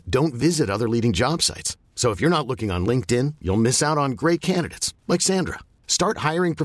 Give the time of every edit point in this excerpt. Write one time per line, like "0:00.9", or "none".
none